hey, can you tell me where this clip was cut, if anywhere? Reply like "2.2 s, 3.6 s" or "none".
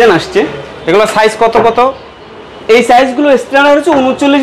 none